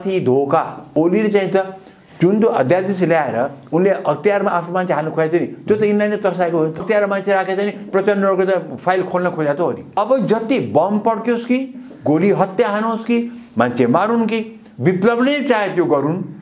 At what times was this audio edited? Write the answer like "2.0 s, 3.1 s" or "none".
0.9 s, 6.8 s, 10.0 s